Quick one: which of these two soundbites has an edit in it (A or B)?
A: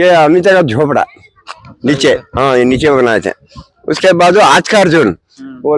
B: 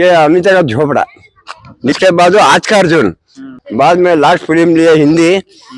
B